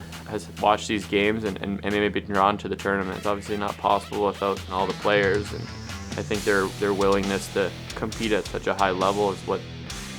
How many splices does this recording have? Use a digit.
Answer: 2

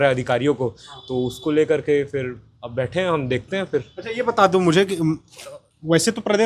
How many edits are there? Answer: 0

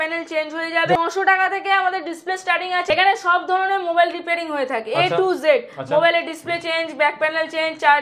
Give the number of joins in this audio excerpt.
2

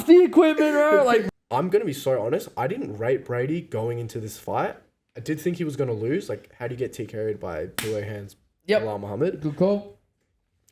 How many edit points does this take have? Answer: 1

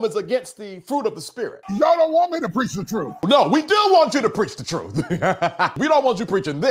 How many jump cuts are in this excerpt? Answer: 3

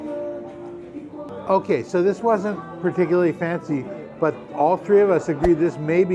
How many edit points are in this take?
1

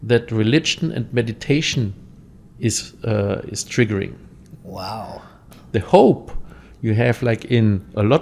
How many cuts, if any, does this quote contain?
1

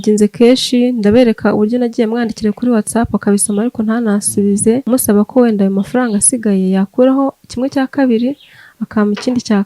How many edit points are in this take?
1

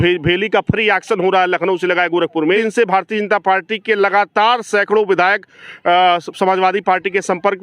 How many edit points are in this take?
1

